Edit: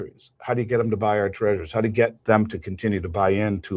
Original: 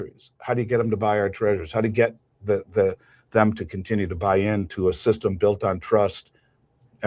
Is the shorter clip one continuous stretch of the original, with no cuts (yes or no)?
no